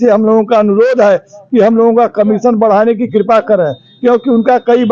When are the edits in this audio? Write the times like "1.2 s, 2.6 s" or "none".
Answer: none